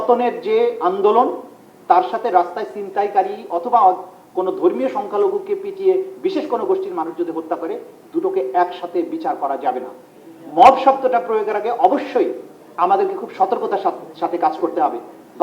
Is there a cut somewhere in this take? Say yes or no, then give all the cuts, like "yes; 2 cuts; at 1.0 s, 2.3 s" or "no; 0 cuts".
no; 0 cuts